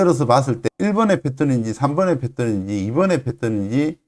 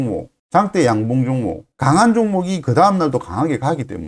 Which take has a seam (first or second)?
second